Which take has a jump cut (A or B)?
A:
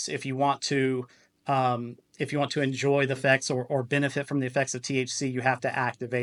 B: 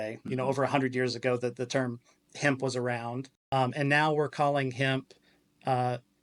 B